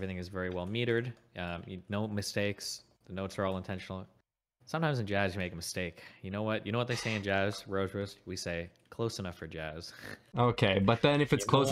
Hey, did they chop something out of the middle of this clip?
no; 0 cuts

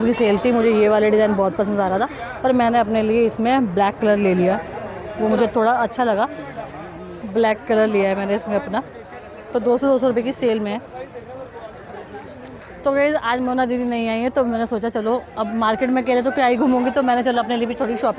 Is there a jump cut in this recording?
no; 0 cuts

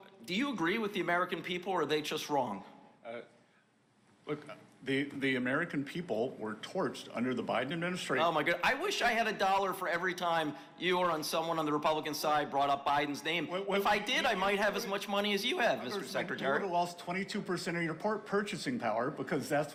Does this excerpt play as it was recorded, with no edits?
yes; 0 cuts

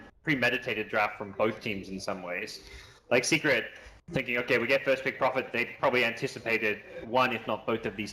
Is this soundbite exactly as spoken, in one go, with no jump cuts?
yes; 0 cuts

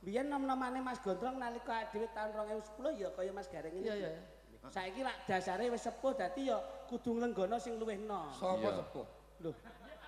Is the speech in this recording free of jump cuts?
yes; 0 cuts

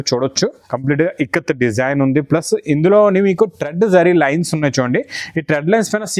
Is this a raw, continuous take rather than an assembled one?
yes; 0 cuts

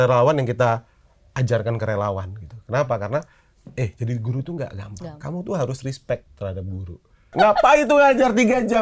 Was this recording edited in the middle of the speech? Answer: yes; 1 cut; at 7.3 s

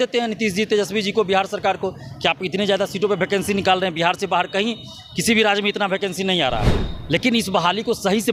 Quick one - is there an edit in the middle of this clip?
no; 0 cuts

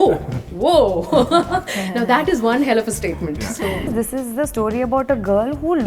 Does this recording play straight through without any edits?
no; 1 cut; at 3.9 s

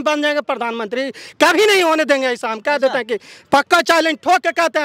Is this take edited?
no; 0 cuts

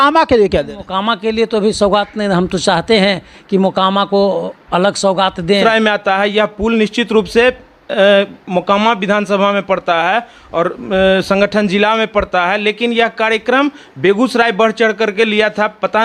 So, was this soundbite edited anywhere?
yes; 1 cut; at 5.6 s

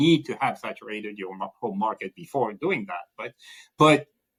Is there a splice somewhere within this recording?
no; 0 cuts

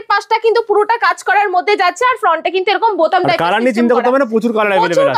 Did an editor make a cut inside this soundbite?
no; 0 cuts

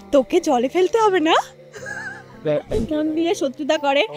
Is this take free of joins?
no; 1 cut; at 2.7 s

